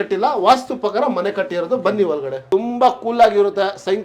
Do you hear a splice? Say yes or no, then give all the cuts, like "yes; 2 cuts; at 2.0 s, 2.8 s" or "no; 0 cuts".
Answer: yes; 1 cut; at 2.3 s